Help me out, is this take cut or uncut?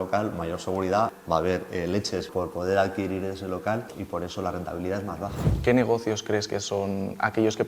cut